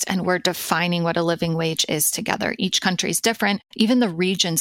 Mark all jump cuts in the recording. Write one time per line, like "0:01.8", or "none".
none